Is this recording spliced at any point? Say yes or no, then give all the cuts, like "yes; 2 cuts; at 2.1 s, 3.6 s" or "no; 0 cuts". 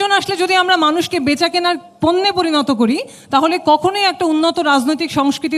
no; 0 cuts